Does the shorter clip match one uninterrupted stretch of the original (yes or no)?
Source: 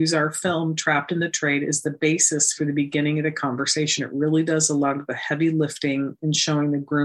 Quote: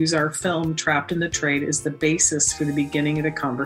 yes